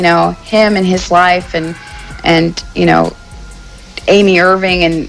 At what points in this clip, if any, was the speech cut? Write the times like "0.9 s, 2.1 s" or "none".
none

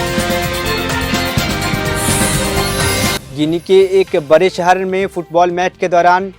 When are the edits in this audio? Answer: 3.2 s

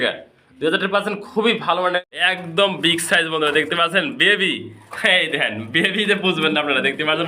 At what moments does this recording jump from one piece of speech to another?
2.0 s

